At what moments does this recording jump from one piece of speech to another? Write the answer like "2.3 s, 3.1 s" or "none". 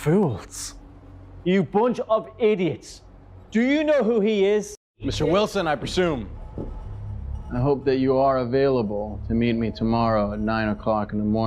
5.0 s